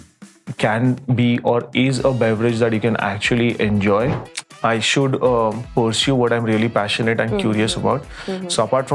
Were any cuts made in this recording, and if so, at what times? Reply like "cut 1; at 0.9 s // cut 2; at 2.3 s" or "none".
cut 1; at 4.2 s

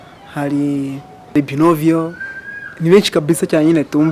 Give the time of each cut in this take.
cut 1; at 1.3 s

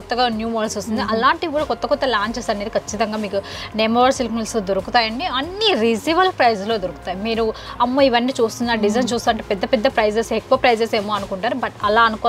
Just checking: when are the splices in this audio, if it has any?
none

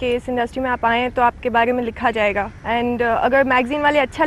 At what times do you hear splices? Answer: cut 1; at 2.6 s

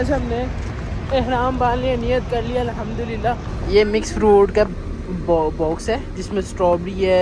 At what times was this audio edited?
cut 1; at 3.5 s

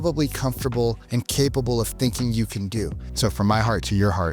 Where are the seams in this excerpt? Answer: cut 1; at 1.0 s // cut 2; at 3.0 s

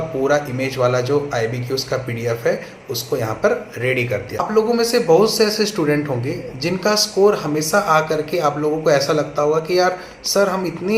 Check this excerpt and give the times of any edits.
cut 1; at 4.6 s

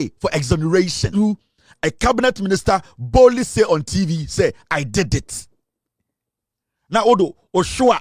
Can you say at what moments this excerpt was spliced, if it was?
cut 1; at 1.1 s

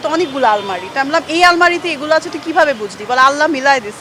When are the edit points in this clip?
none

